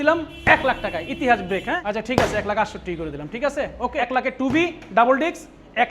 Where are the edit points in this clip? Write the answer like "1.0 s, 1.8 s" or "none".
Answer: 1.8 s, 4.3 s